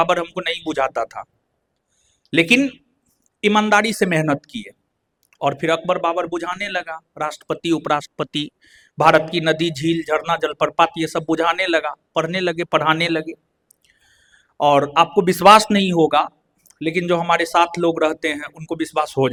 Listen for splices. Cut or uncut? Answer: uncut